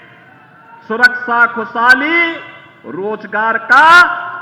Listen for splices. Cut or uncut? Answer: uncut